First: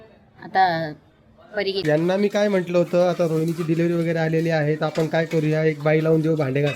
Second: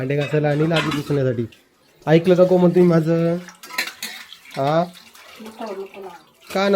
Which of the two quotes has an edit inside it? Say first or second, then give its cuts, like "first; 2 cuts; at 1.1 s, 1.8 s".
first; 1 cut; at 1.8 s